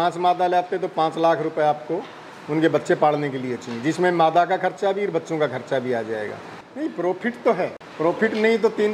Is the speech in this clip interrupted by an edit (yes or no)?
yes